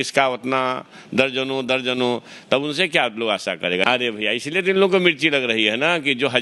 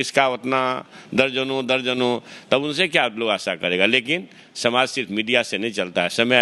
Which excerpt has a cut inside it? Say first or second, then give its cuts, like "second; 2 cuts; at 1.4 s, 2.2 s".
first; 1 cut; at 3.8 s